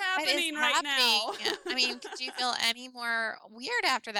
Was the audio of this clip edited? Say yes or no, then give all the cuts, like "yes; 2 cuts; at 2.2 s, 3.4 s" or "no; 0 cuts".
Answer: no; 0 cuts